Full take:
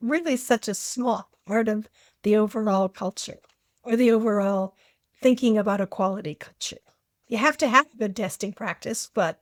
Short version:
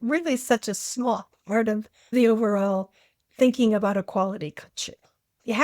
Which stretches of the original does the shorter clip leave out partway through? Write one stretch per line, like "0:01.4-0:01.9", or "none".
0:02.1-0:04.0